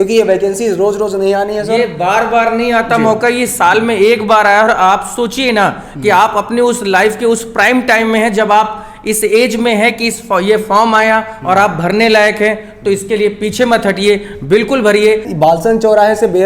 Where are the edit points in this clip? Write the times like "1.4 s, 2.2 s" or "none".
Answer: 15.3 s